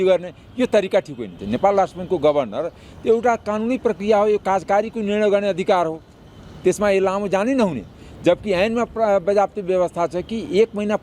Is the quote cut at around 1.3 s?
yes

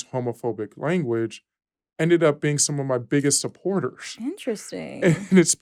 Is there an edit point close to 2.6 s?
no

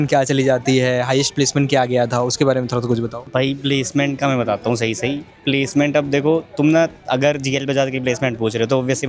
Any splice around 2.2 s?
no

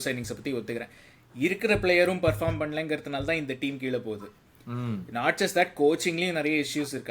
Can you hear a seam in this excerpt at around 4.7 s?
no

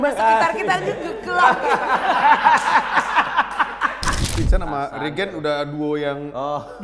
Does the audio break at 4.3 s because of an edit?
yes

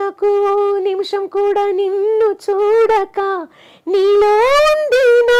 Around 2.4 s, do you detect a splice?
no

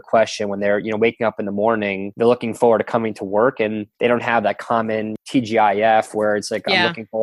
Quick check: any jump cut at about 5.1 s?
yes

